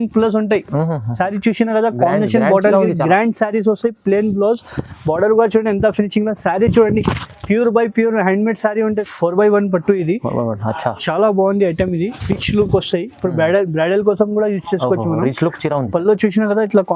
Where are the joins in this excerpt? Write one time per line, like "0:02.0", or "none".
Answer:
0:09.0